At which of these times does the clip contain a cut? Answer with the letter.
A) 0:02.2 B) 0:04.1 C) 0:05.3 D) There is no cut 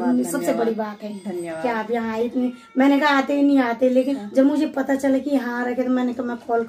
B